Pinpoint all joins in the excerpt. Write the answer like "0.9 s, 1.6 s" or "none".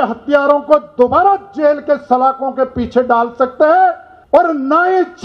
4.1 s